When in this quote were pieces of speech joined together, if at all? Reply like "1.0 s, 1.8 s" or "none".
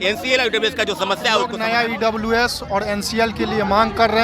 1.5 s